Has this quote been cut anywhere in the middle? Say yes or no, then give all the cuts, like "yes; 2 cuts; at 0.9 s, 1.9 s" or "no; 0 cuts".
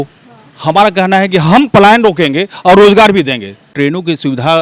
yes; 1 cut; at 3.7 s